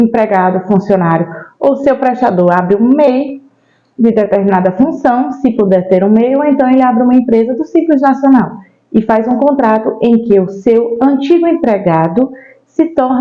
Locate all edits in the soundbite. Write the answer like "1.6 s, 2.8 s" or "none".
none